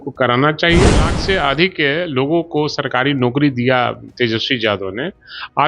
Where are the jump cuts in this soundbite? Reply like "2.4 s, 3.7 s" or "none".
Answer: 1.1 s